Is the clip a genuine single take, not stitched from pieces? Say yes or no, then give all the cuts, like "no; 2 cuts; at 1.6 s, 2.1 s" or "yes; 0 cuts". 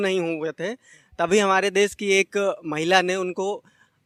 yes; 0 cuts